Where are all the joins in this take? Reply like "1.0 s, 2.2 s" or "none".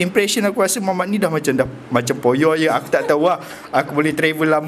none